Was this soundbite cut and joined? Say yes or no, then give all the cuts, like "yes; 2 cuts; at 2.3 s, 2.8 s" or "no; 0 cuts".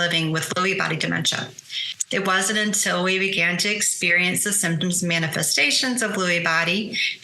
yes; 1 cut; at 1.8 s